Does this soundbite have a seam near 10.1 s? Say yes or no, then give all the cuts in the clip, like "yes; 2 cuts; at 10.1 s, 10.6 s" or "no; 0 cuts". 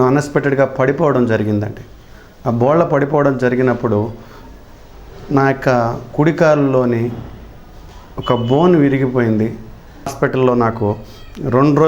yes; 1 cut; at 10.1 s